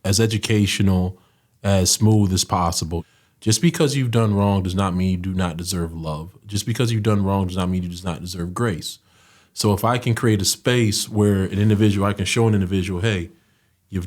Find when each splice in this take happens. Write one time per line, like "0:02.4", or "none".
0:02.9